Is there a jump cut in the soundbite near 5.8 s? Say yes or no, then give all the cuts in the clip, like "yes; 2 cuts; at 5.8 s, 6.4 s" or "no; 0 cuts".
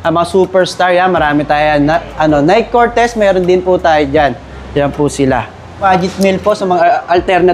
yes; 1 cut; at 5.8 s